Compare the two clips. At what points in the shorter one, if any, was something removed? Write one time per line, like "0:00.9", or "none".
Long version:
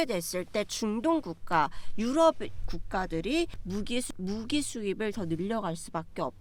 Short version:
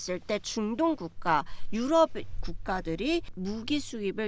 0:03.3